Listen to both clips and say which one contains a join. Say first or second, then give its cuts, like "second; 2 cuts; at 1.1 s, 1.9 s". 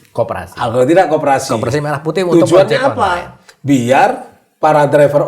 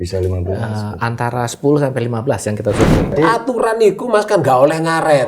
second; 1 cut; at 3.1 s